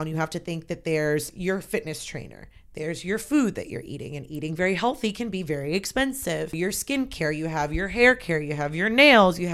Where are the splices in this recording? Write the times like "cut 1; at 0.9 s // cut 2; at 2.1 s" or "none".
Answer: cut 1; at 1.3 s // cut 2; at 6.6 s